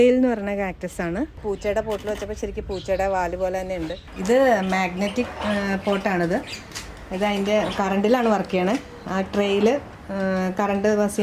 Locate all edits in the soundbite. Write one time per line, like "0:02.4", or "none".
0:01.4
0:04.1